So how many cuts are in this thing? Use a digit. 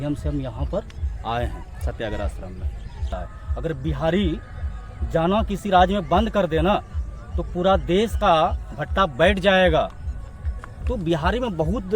1